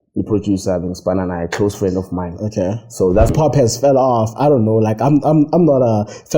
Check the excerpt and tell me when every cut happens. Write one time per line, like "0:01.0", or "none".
0:03.3